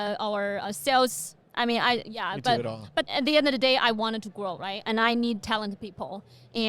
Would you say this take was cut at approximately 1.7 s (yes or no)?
no